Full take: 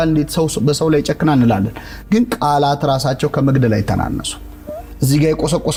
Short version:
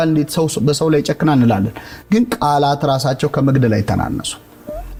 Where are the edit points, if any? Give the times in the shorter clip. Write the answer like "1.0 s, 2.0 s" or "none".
none